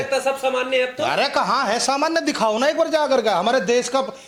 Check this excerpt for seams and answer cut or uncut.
uncut